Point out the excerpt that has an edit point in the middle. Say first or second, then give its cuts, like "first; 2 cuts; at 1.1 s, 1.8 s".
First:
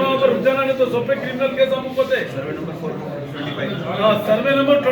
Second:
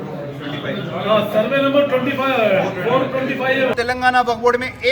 second; 1 cut; at 3.7 s